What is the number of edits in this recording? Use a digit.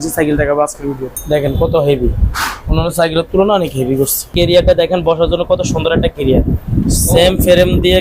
2